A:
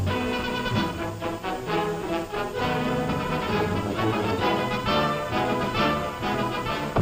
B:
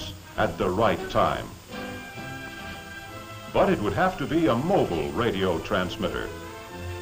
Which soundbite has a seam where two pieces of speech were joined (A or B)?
B